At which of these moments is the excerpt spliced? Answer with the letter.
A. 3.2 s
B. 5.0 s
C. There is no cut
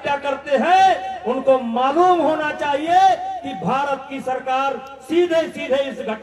C